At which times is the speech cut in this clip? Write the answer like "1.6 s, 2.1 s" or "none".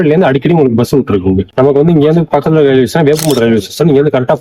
1.5 s